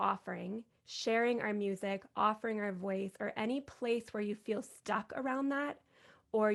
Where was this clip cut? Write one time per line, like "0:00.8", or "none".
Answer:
none